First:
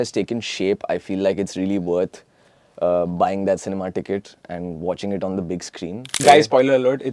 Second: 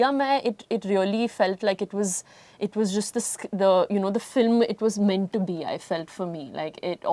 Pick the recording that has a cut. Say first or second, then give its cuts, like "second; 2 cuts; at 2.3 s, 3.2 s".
first; 1 cut; at 6.1 s